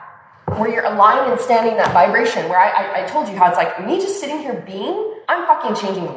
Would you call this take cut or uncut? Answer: cut